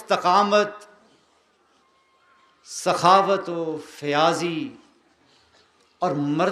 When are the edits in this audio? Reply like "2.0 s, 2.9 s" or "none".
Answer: none